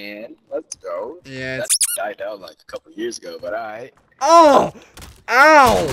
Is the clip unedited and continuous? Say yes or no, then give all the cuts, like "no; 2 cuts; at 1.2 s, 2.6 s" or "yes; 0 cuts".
yes; 0 cuts